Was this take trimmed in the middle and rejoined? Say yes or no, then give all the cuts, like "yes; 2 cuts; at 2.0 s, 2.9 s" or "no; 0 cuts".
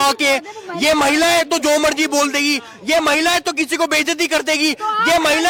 no; 0 cuts